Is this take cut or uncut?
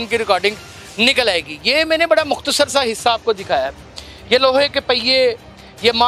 uncut